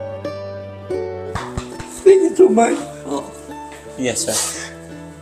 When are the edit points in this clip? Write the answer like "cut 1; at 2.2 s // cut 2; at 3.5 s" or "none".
cut 1; at 1.4 s